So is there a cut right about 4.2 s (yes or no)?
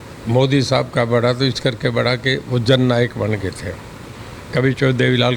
no